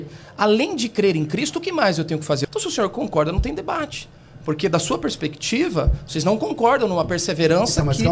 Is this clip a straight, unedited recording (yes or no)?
no